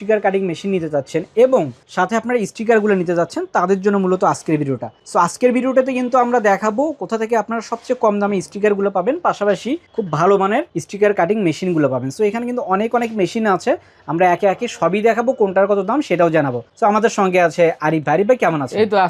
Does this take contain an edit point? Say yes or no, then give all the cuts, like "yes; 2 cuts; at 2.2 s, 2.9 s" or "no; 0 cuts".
no; 0 cuts